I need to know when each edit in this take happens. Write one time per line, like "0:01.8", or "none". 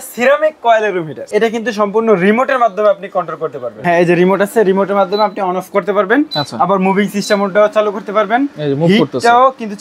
0:01.1
0:03.7

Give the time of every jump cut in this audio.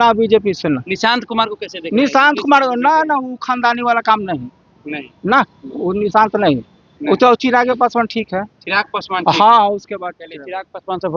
none

